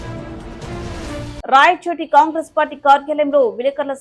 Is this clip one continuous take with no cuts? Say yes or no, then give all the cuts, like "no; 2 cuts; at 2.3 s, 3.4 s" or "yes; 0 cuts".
no; 1 cut; at 1.4 s